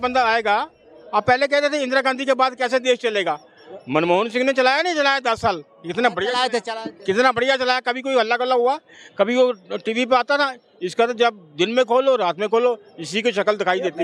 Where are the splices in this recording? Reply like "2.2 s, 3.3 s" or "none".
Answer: none